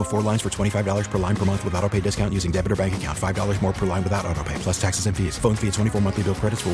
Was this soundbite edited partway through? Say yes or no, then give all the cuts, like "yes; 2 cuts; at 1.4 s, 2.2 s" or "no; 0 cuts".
no; 0 cuts